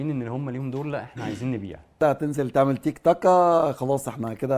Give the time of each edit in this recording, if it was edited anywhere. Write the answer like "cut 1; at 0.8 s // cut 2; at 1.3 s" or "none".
cut 1; at 2.0 s